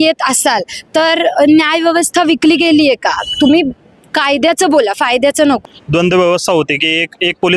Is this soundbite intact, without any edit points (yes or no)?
no